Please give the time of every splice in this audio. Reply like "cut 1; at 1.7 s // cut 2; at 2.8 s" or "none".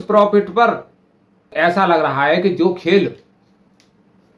cut 1; at 1.5 s